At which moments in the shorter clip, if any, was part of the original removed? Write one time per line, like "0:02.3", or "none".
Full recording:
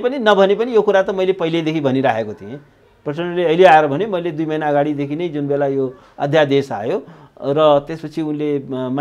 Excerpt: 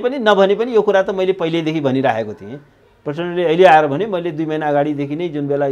none